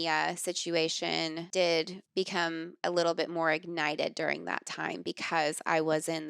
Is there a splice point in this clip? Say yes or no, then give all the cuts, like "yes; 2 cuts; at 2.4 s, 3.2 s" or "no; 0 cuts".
yes; 2 cuts; at 1.4 s, 2.0 s